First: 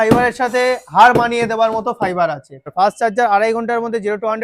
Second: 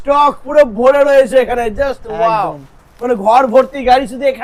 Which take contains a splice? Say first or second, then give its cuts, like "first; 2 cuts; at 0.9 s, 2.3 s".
first; 1 cut; at 2.7 s